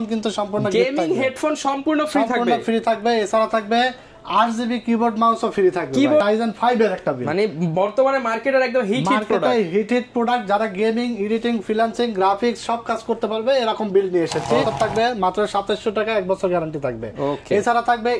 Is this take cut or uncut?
cut